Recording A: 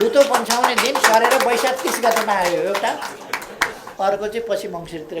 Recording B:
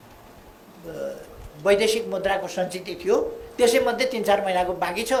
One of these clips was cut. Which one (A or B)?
A